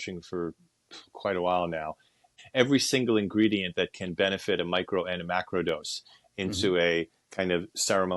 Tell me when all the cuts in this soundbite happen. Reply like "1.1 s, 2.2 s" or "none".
2.3 s